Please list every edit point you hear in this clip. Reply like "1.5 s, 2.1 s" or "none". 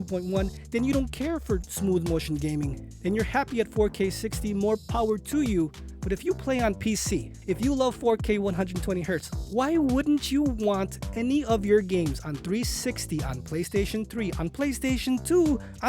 5.8 s